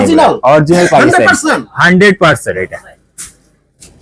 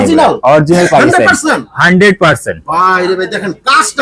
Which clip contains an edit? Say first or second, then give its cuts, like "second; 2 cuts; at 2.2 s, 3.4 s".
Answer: first; 1 cut; at 2.6 s